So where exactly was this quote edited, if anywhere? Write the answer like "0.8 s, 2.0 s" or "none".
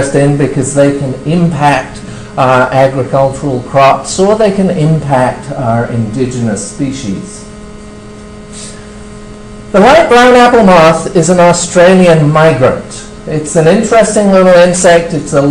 none

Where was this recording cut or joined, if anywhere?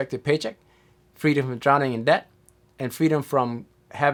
none

